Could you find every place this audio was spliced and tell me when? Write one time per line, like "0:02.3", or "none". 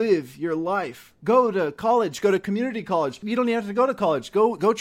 0:03.2

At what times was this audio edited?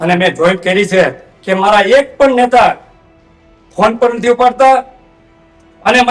0:01.3

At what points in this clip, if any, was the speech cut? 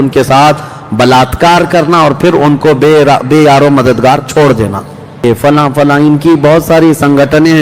0:05.2

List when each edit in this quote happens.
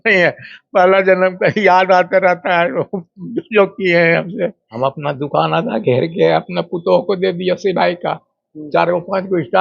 0:04.6

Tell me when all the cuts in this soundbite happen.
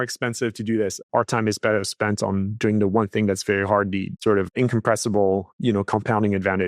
0:01.0
0:04.1
0:05.5

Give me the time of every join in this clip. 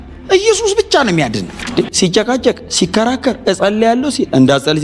0:01.6

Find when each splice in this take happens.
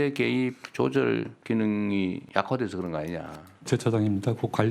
0:01.3
0:02.2
0:03.7

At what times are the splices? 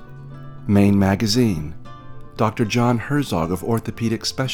none

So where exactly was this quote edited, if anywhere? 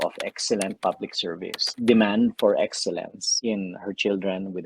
0:01.6
0:03.2

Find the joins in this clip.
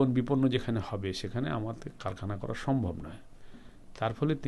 none

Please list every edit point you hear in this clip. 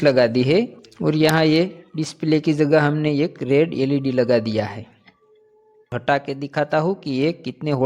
0:05.9

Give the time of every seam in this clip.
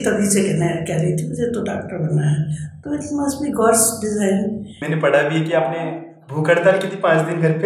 0:04.7

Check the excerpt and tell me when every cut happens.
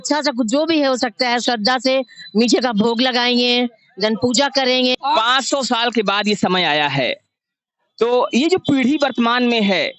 0:04.9

